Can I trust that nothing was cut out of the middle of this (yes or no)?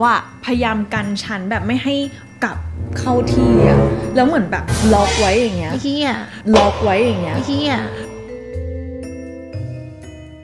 yes